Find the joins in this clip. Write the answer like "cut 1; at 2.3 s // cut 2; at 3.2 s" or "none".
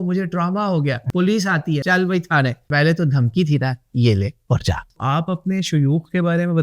cut 1; at 1.0 s // cut 2; at 1.8 s // cut 3; at 2.7 s // cut 4; at 4.9 s